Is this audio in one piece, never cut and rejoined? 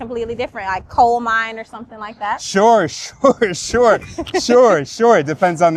yes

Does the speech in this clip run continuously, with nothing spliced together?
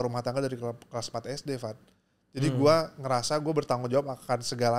yes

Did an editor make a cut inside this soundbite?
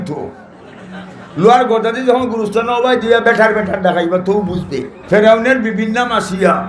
yes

